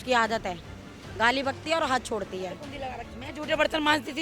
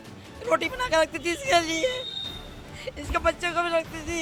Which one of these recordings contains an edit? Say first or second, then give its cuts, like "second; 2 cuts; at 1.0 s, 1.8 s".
first; 1 cut; at 3.1 s